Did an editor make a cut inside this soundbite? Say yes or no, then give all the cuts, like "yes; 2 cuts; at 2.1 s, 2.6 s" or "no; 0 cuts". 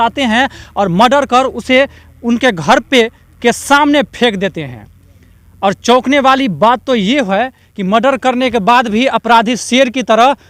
no; 0 cuts